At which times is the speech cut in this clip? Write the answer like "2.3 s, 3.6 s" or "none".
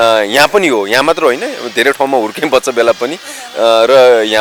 none